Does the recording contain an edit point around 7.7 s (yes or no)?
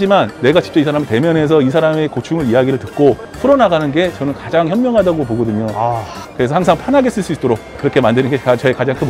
yes